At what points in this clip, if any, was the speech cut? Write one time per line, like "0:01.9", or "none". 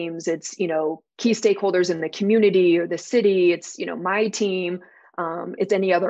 0:01.1

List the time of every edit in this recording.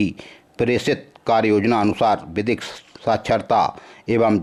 none

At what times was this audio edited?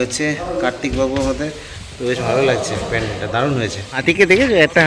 none

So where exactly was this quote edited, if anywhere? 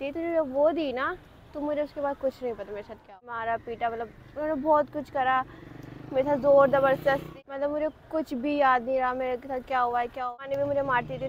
0:03.3
0:07.3
0:10.4

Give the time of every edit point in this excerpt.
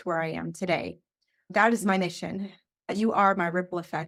none

